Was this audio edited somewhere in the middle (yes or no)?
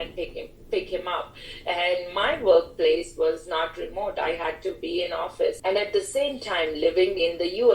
yes